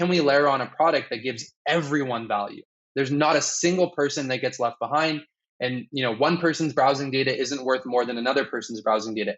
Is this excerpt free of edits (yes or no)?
yes